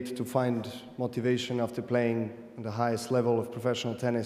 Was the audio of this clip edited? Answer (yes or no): no